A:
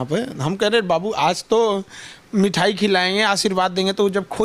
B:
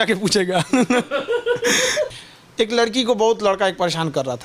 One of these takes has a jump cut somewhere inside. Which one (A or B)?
B